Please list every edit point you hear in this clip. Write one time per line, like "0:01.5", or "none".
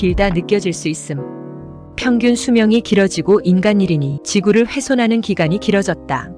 0:04.1